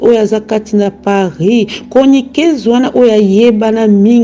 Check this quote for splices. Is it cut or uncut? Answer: uncut